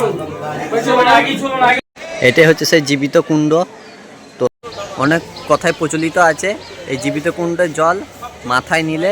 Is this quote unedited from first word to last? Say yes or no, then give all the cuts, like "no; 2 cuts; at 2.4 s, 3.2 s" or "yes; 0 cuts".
no; 2 cuts; at 1.8 s, 4.5 s